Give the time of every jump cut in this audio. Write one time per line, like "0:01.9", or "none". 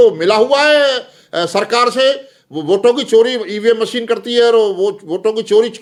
none